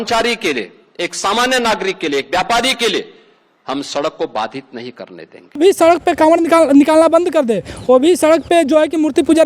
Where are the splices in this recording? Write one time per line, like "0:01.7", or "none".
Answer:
0:05.6